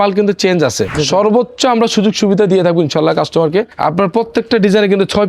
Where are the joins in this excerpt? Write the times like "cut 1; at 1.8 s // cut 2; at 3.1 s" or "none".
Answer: cut 1; at 1.0 s // cut 2; at 3.7 s